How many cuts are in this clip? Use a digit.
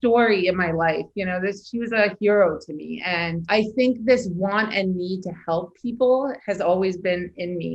1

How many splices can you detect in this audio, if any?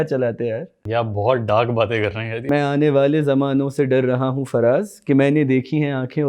2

